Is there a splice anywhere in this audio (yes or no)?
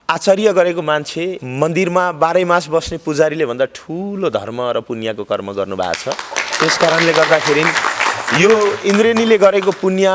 no